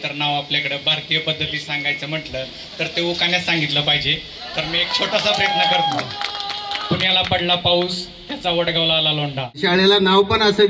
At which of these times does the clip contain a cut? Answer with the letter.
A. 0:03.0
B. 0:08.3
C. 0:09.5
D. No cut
C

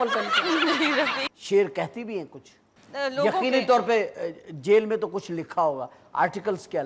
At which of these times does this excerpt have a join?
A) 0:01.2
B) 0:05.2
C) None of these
A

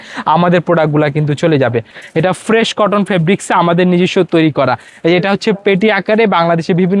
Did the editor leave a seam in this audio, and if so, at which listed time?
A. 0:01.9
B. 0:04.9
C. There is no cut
A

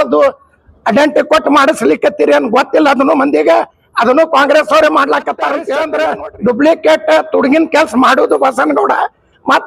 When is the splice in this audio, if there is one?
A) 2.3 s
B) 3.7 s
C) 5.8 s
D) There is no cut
C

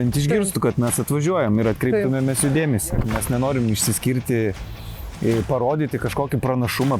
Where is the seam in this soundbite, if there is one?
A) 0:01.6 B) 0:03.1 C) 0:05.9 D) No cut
B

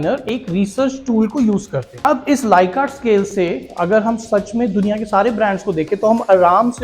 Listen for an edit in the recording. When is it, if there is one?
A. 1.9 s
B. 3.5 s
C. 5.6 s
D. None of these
A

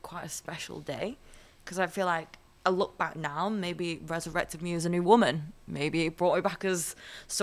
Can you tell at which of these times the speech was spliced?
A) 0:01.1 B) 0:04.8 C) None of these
C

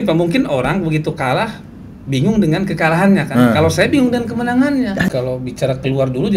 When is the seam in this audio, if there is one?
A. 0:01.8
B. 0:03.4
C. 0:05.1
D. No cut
C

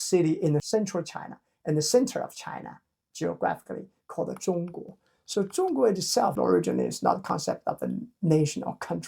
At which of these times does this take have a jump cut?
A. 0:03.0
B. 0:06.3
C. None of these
B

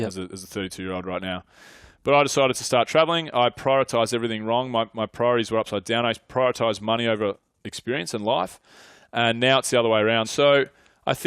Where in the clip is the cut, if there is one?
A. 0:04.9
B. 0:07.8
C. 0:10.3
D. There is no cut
C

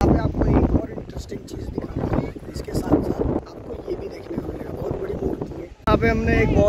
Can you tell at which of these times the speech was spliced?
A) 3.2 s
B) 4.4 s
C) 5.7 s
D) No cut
C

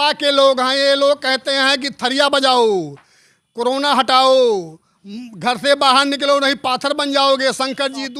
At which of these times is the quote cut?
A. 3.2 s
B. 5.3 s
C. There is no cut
C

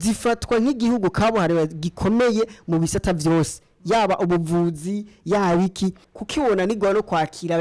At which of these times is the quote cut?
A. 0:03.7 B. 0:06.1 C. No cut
B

